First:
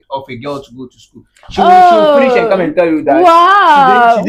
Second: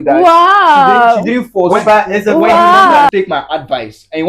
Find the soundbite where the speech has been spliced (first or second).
second